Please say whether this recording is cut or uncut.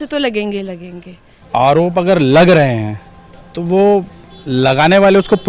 cut